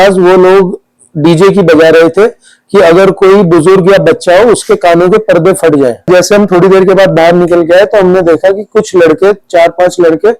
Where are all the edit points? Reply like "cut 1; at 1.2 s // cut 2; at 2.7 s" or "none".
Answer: cut 1; at 6.1 s